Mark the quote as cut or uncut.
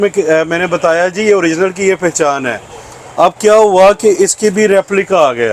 uncut